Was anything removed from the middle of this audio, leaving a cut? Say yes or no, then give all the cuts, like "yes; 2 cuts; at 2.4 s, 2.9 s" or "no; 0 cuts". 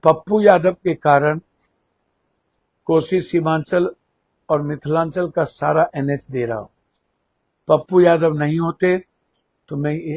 no; 0 cuts